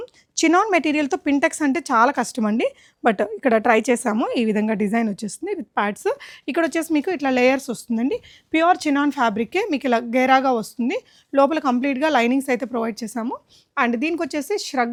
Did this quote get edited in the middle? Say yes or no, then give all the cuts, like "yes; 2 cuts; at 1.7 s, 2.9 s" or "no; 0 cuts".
no; 0 cuts